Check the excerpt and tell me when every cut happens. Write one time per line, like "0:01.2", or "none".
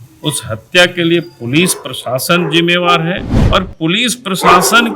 0:03.3